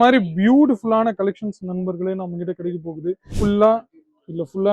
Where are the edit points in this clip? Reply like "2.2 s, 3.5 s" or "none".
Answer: 3.3 s